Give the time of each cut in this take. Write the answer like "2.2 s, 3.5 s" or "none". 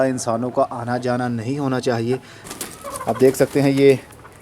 2.4 s